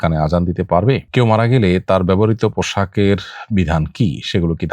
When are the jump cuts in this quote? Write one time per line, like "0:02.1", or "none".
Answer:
0:01.0